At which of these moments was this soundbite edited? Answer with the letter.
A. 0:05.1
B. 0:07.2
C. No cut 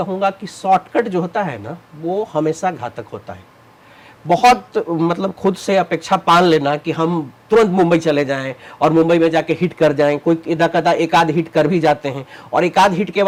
C